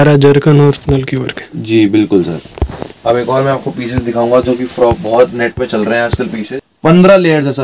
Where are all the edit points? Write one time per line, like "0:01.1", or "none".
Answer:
0:06.4